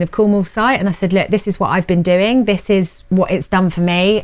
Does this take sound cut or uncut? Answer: uncut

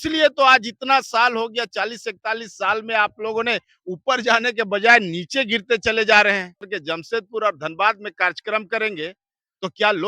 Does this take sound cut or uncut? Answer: cut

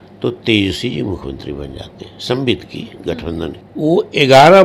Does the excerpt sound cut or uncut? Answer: uncut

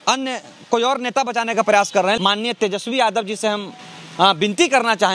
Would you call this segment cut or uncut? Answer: cut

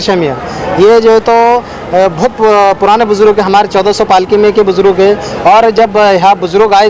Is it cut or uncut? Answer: uncut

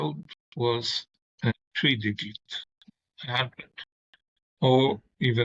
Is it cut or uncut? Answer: cut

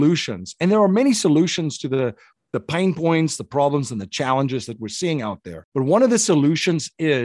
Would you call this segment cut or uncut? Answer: cut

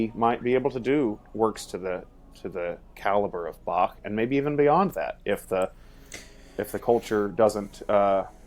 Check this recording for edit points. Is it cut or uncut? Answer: uncut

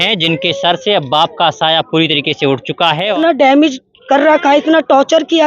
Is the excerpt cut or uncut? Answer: cut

